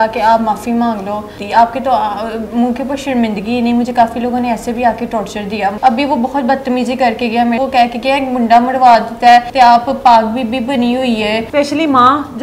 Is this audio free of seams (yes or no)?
no